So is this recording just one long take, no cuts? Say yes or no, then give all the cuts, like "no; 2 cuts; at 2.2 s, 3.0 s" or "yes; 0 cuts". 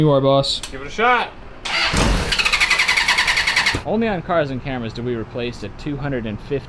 no; 1 cut; at 3.8 s